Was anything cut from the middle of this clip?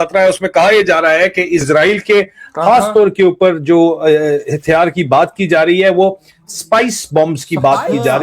yes; 1 cut; at 1.6 s

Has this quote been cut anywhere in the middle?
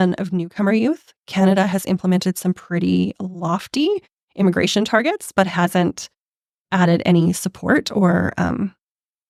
no; 0 cuts

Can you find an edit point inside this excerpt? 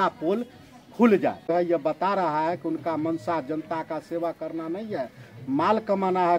yes; 1 cut; at 1.5 s

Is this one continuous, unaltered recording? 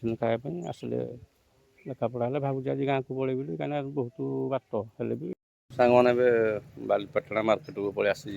no; 1 cut; at 5.3 s

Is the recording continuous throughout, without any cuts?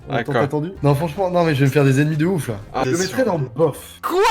no; 1 cut; at 2.8 s

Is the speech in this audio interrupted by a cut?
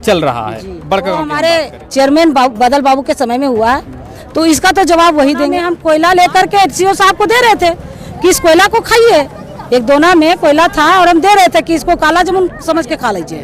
yes; 2 cuts; at 1.3 s, 5.7 s

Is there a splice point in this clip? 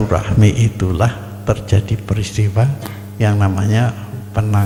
no; 0 cuts

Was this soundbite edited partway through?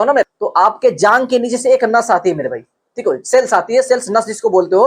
no; 0 cuts

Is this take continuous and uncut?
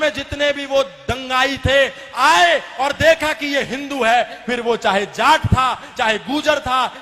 yes; 0 cuts

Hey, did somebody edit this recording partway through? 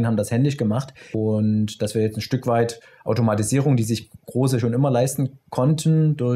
yes; 1 cut; at 1.1 s

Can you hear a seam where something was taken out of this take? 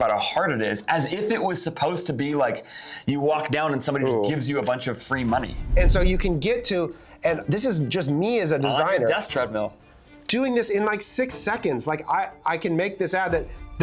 yes; 1 cut; at 5.7 s

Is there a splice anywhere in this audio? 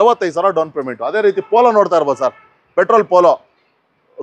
no; 0 cuts

